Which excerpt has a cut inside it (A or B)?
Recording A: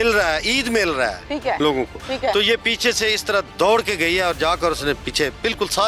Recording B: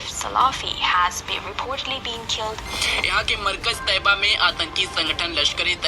B